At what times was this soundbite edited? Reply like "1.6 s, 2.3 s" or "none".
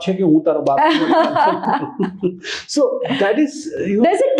none